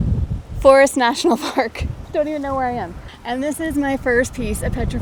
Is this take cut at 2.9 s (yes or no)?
no